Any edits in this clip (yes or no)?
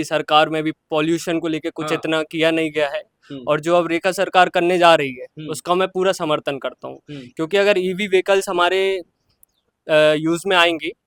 no